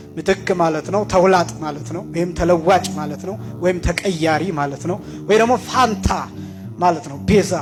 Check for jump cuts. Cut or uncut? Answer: uncut